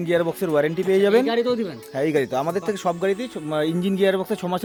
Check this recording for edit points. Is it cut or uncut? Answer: uncut